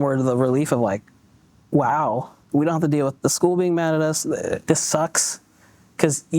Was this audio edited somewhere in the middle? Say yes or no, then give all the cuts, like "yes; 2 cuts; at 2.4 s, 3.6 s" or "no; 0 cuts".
yes; 2 cuts; at 2.3 s, 4.6 s